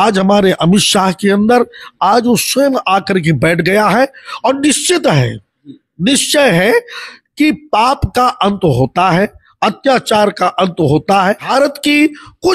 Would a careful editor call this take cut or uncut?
cut